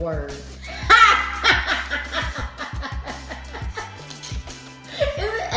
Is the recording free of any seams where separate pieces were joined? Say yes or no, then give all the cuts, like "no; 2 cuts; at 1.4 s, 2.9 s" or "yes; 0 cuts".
yes; 0 cuts